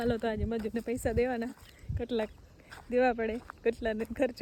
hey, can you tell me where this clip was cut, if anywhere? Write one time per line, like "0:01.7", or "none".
none